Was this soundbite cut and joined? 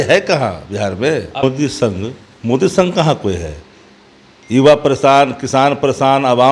yes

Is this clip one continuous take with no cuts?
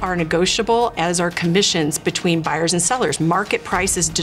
yes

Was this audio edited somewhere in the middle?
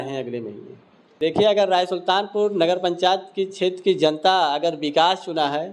yes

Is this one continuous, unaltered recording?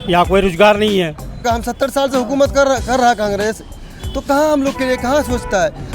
no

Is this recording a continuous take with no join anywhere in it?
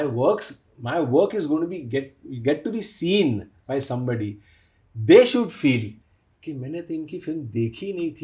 yes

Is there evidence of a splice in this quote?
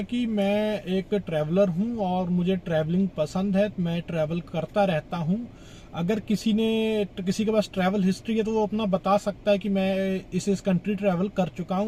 no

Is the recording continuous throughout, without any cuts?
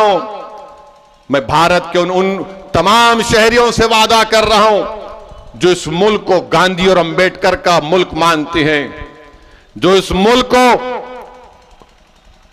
yes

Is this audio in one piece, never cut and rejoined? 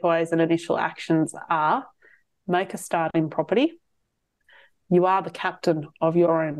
yes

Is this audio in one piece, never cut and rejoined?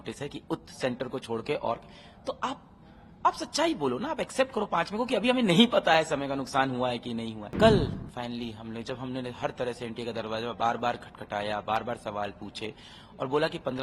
no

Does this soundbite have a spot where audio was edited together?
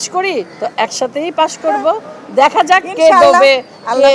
no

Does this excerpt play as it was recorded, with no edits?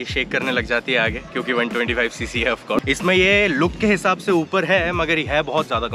no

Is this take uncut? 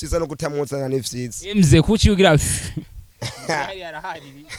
yes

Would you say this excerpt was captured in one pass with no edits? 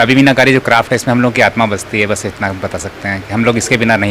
yes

